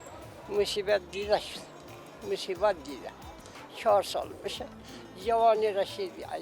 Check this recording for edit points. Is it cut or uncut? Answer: uncut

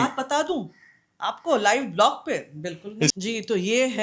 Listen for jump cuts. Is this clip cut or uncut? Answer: cut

